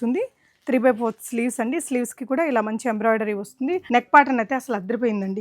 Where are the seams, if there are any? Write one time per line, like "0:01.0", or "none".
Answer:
0:03.8

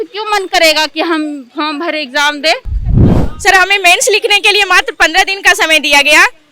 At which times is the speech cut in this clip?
0:02.8

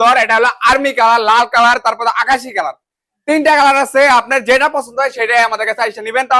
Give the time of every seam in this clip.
none

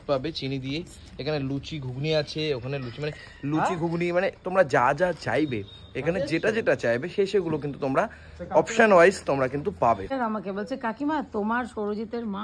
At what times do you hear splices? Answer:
0:10.1

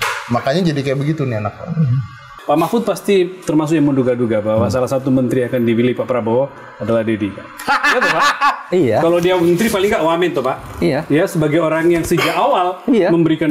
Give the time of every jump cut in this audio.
0:02.3

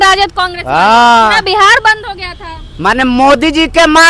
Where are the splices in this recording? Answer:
none

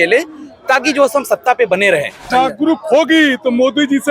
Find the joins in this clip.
0:02.3

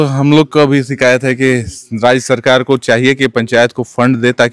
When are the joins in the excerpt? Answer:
none

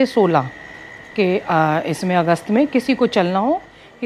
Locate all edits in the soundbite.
none

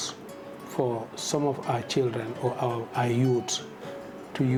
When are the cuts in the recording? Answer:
none

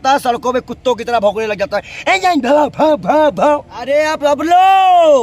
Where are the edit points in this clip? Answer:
0:03.8

